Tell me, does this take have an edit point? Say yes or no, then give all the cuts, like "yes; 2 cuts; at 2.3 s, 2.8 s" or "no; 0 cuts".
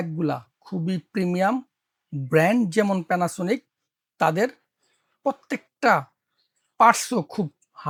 no; 0 cuts